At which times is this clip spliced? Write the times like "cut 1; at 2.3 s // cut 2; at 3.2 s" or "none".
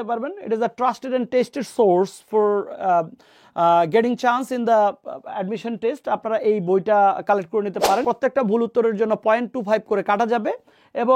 cut 1; at 8.0 s